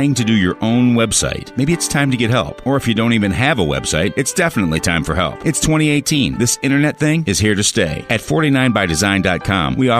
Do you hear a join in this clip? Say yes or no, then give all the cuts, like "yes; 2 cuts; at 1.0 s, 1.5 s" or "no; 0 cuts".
no; 0 cuts